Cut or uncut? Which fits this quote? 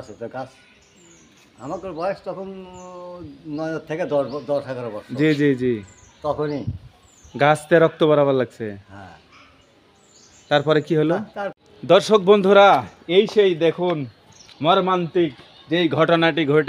cut